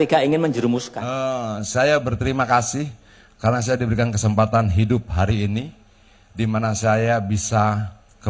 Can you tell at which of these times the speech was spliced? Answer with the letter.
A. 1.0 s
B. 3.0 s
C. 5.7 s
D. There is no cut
A